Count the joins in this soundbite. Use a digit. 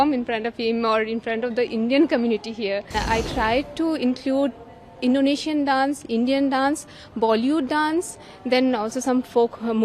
1